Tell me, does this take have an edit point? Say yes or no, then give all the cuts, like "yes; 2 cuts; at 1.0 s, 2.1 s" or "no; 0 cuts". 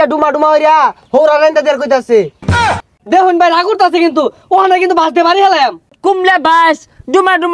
yes; 2 cuts; at 2.7 s, 6.0 s